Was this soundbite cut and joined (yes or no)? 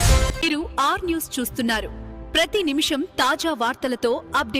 no